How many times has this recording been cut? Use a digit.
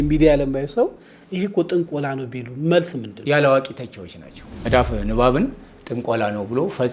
2